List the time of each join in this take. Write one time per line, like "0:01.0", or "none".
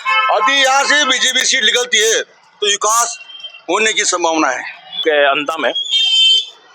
0:05.0